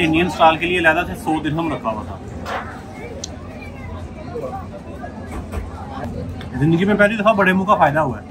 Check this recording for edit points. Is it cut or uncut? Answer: cut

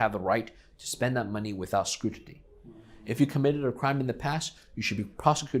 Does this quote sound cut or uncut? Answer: uncut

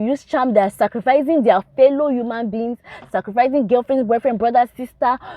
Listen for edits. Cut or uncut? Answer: uncut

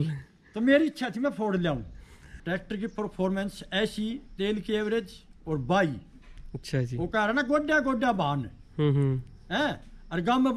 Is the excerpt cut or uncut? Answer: cut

